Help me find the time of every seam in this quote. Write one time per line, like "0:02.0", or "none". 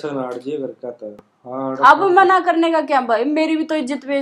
none

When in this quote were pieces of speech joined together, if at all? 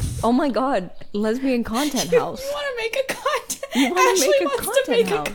0:01.0

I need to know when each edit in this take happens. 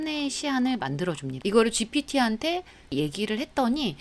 0:01.3

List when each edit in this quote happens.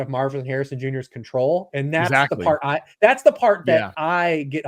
none

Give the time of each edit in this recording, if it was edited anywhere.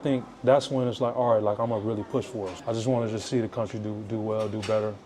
0:02.5

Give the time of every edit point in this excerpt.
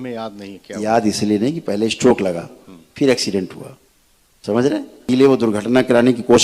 0:05.1

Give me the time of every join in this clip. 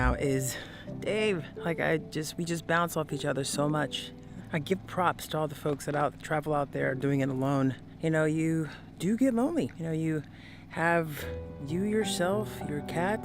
0:04.4

